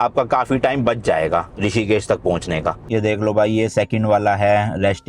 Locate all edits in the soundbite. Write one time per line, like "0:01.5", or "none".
0:02.9